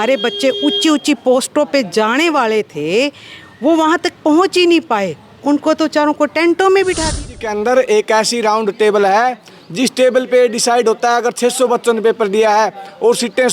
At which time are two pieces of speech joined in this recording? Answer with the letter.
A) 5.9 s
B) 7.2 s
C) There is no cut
B